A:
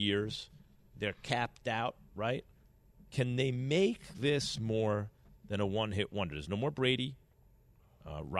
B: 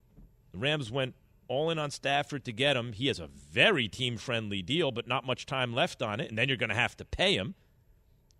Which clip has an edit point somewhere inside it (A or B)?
A